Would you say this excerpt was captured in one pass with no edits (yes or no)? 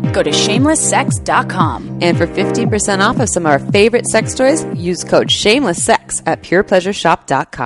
yes